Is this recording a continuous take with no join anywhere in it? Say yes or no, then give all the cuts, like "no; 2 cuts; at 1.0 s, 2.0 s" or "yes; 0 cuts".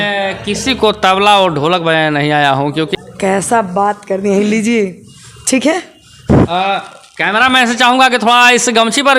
no; 1 cut; at 2.9 s